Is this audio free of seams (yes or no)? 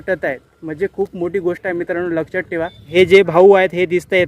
no